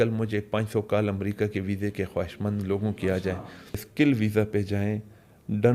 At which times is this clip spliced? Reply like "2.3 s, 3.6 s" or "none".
3.8 s